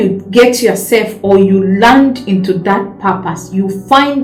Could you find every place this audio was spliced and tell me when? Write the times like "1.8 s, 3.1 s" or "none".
none